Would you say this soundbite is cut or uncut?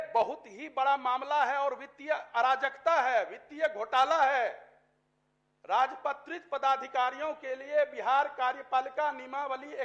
uncut